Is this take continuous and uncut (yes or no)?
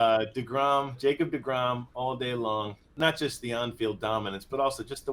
no